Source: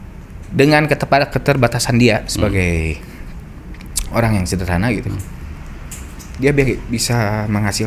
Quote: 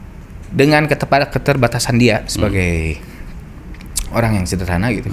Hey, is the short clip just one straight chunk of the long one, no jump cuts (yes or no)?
yes